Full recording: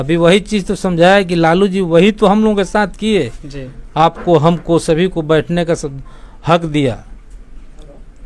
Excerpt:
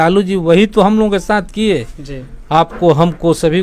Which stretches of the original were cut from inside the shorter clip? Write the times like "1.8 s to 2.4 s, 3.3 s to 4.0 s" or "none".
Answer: none